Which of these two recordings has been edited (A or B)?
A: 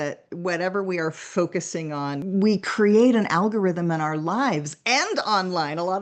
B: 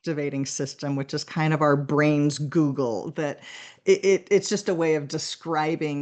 A